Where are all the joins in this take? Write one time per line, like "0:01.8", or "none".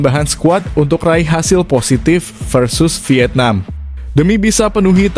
none